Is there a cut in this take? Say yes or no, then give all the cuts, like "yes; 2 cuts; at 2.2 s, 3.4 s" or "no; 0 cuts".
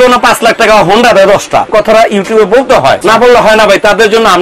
yes; 2 cuts; at 1.7 s, 3.0 s